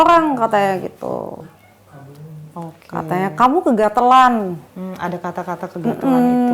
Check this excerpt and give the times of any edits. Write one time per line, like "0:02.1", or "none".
none